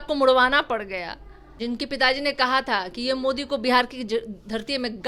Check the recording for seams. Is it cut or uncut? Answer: cut